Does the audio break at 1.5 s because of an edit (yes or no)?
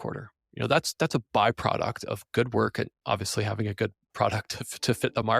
no